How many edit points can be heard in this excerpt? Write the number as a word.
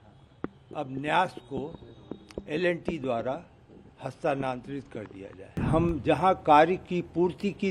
one